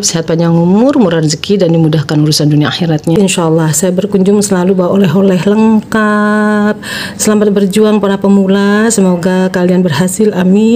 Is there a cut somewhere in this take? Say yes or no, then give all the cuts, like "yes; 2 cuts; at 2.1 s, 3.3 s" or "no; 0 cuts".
yes; 1 cut; at 3.1 s